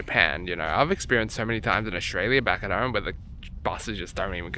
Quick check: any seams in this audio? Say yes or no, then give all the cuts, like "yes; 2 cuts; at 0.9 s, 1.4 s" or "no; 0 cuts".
no; 0 cuts